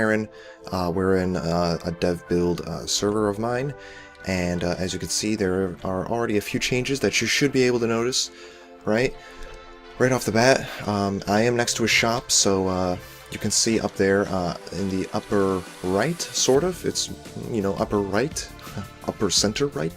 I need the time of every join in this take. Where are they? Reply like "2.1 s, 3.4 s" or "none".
18.6 s